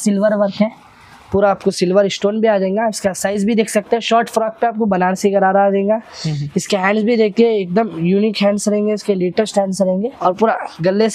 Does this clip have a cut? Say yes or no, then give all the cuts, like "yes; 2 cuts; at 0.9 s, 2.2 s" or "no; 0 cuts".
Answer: yes; 1 cut; at 10.1 s